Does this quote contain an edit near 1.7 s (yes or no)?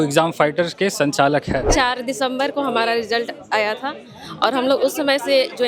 yes